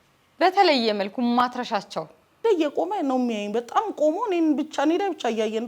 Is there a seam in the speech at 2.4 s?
yes; 1 cut; at 2.4 s

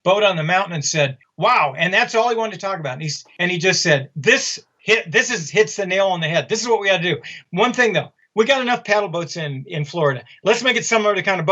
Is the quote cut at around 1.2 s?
yes; 2 cuts; at 1.2 s, 8.2 s

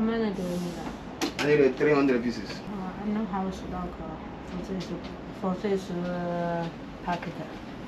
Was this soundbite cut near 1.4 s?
no; 1 cut; at 2.7 s

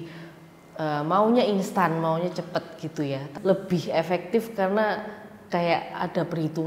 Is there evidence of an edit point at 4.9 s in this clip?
no; 1 cut; at 3.3 s

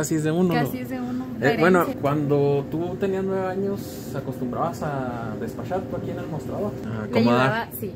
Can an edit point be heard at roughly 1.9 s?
yes; 2 cuts; at 1.9 s, 6.8 s

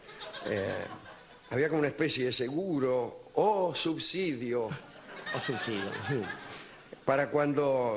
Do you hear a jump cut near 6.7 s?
no; 0 cuts

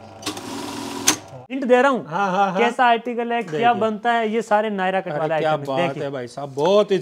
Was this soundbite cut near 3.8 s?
no; 1 cut; at 1.6 s

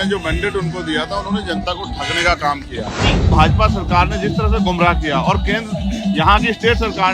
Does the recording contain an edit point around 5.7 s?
no; 1 cut; at 3.3 s

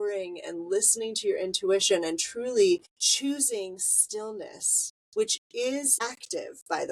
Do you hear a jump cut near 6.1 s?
yes; 2 cuts; at 3.0 s, 6.1 s

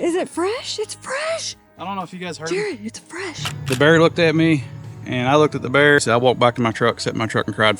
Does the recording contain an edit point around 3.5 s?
yes; 2 cuts; at 3.5 s, 6.0 s

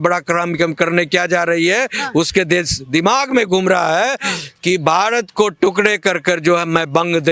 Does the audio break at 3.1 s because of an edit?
no; 0 cuts

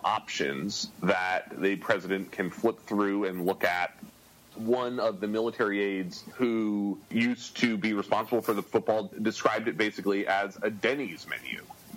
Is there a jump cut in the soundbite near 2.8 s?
no; 3 cuts; at 6.2 s, 7.0 s, 8.6 s

